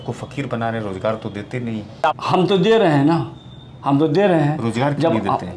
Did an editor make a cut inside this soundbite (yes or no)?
no